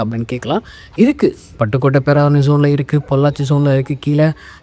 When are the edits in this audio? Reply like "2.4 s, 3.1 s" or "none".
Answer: none